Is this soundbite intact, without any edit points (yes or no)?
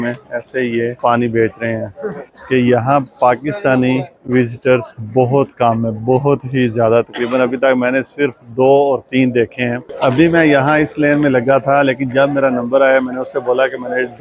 no